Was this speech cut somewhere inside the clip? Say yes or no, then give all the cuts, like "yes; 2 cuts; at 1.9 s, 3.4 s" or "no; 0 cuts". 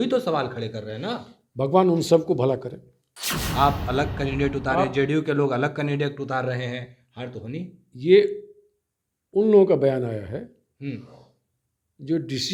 yes; 1 cut; at 3.4 s